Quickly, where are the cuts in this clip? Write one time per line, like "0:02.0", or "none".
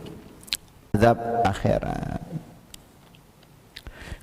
0:01.0